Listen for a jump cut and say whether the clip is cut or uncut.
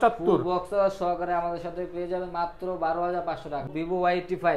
cut